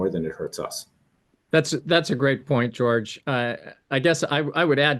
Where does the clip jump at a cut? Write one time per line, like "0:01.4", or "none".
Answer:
none